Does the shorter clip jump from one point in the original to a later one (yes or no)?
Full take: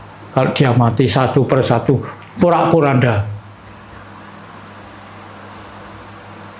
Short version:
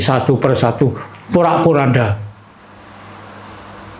yes